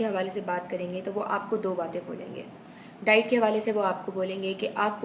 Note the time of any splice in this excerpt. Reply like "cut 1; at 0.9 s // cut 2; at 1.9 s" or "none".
none